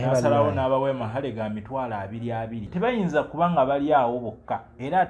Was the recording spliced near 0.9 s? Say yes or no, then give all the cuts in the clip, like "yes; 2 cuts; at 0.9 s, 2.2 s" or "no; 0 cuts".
no; 1 cut; at 2.7 s